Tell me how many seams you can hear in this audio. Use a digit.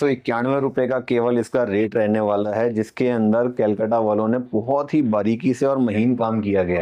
0